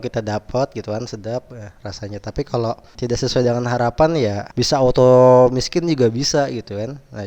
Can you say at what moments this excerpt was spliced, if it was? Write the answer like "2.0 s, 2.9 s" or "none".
2.9 s, 4.4 s